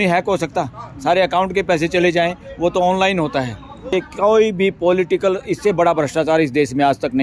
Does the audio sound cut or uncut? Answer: cut